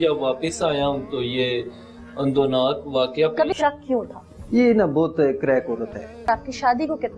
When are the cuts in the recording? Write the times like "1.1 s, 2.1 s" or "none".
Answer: 3.5 s, 6.3 s

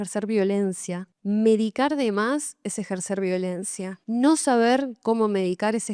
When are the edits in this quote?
none

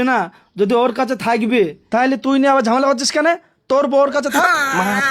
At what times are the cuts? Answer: none

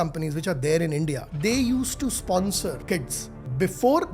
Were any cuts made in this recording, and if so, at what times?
1.3 s, 3.3 s

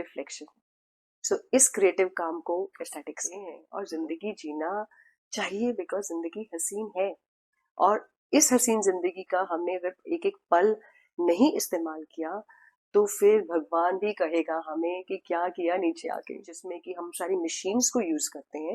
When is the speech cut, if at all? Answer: 3.7 s, 17.0 s

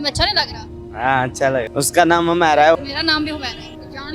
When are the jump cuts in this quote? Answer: 1.7 s, 2.8 s

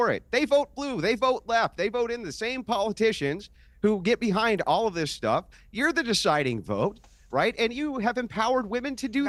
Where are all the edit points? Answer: none

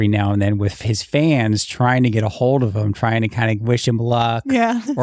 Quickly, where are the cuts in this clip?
none

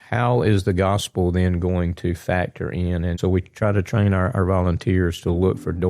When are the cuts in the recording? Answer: 3.2 s

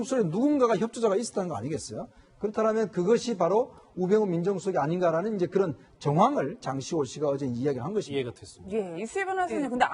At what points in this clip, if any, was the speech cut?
5.1 s

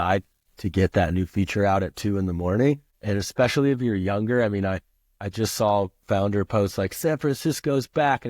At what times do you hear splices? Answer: 2.9 s

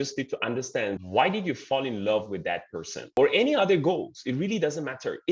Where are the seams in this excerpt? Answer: 1.0 s, 3.1 s

